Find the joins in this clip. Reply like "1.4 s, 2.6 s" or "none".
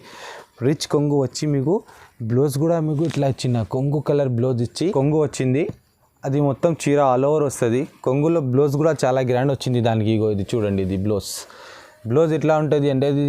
4.9 s